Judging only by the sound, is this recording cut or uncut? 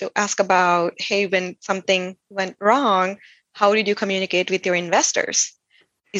uncut